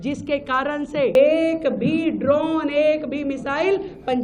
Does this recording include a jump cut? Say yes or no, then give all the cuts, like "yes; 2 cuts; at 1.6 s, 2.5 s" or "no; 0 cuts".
yes; 1 cut; at 1.1 s